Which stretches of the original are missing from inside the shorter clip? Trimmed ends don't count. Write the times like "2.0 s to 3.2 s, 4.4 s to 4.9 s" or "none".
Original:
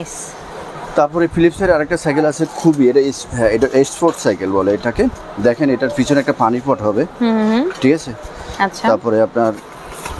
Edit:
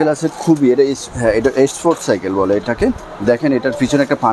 none